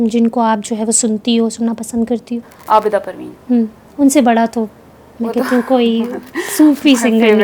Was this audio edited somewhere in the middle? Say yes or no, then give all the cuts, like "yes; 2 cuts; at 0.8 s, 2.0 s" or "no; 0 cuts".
no; 0 cuts